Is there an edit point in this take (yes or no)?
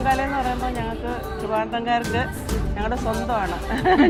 no